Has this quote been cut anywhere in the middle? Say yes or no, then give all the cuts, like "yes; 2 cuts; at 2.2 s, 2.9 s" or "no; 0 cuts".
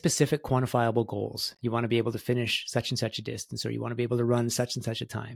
no; 0 cuts